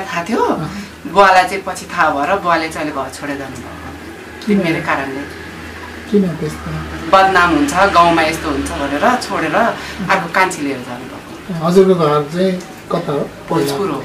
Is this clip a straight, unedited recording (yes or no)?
yes